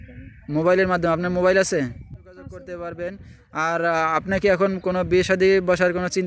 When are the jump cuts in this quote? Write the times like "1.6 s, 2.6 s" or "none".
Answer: 2.5 s

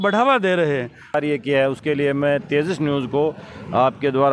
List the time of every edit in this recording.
1.1 s

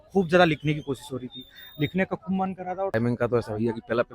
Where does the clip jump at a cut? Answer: 2.9 s

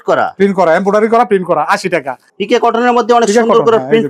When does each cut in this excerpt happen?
2.2 s

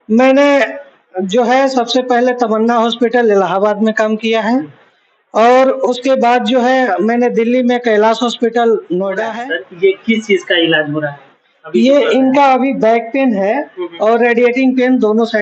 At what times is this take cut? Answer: 9.4 s

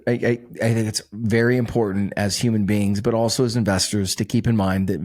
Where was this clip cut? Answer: none

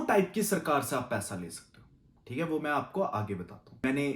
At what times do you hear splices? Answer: none

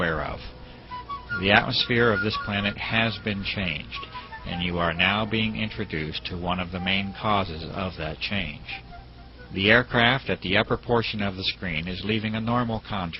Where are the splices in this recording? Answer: none

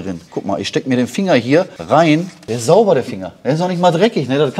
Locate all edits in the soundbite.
2.2 s

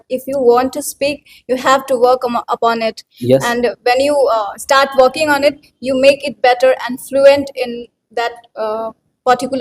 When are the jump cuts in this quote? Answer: none

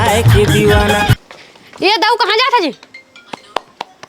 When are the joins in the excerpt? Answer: 1.2 s

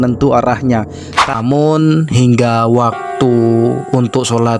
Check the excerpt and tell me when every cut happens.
1.3 s

